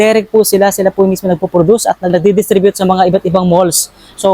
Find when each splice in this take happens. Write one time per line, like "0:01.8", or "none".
0:02.1